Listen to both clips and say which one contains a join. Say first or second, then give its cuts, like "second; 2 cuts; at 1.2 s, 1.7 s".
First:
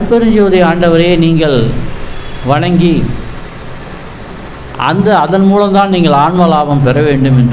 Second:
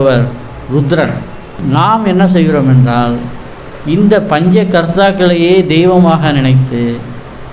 second; 1 cut; at 1.6 s